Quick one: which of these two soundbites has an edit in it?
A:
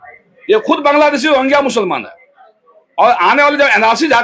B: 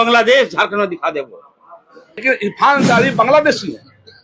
B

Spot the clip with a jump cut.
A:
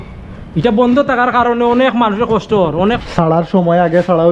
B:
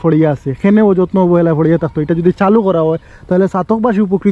A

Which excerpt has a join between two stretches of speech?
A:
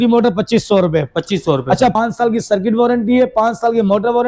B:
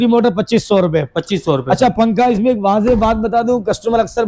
A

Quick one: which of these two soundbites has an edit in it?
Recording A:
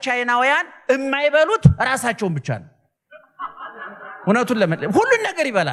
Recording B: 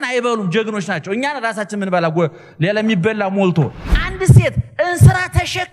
B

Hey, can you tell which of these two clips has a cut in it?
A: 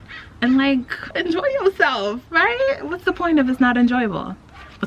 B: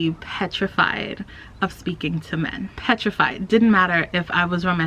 B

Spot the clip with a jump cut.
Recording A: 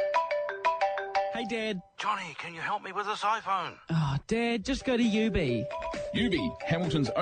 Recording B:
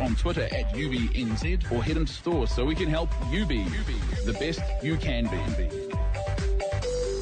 A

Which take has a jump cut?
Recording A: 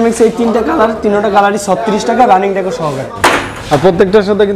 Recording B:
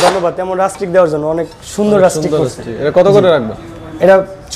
A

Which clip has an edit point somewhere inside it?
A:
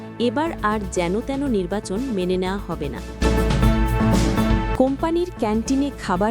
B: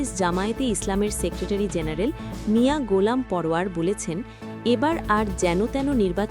A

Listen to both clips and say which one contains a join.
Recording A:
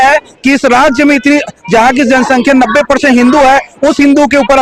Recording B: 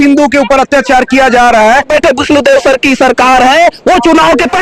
B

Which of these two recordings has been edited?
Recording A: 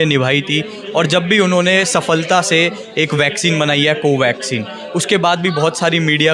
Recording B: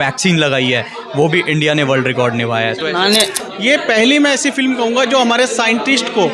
B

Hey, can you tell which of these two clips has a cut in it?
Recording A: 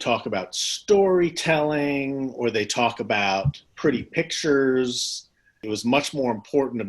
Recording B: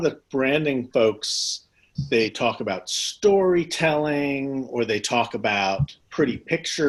A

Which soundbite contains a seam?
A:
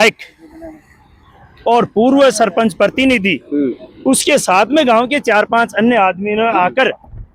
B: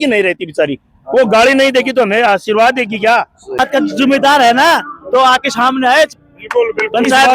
B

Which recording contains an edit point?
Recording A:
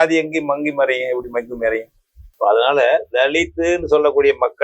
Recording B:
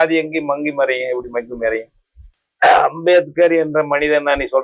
B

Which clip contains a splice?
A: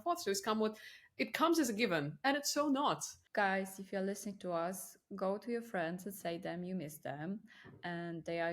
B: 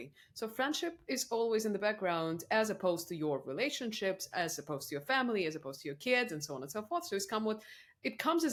A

